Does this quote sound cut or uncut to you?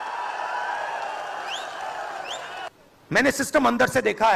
cut